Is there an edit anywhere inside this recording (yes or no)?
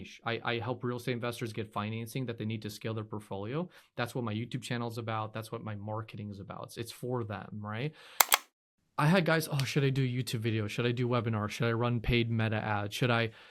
yes